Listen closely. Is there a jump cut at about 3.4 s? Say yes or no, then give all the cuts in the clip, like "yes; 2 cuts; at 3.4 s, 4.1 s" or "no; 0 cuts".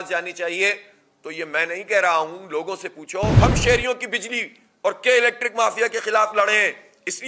yes; 1 cut; at 3.4 s